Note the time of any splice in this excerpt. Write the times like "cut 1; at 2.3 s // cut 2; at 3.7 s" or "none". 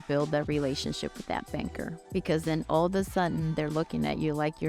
none